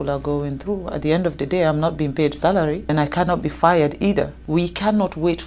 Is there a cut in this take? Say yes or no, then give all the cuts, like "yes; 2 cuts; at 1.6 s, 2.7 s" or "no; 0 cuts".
yes; 2 cuts; at 2.9 s, 4.4 s